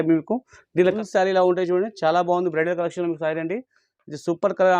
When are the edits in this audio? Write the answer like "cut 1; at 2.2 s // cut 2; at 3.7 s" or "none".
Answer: cut 1; at 0.9 s